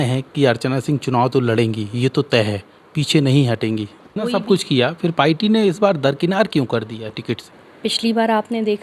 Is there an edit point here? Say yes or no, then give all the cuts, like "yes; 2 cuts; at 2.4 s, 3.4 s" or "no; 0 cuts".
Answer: yes; 2 cuts; at 4.0 s, 7.6 s